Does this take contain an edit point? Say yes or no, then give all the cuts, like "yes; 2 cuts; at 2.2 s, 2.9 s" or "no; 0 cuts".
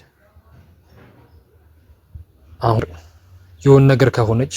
yes; 1 cut; at 2.8 s